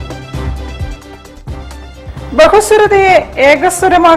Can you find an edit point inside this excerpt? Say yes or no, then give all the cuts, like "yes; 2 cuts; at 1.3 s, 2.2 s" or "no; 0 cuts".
yes; 1 cut; at 1.6 s